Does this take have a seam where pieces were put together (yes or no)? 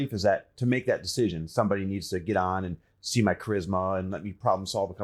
no